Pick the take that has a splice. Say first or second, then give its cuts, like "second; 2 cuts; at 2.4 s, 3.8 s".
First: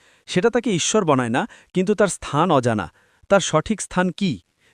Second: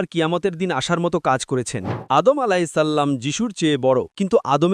second; 1 cut; at 1.9 s